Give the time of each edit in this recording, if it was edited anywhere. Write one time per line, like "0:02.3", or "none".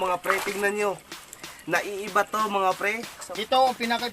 0:03.1